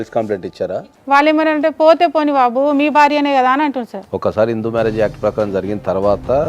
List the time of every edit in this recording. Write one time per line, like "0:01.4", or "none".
0:00.8
0:04.0